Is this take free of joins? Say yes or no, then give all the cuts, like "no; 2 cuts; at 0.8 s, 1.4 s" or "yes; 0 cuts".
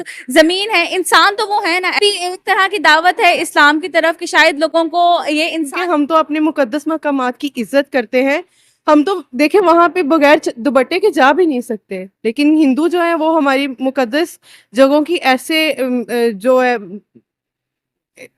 no; 2 cuts; at 2.0 s, 5.7 s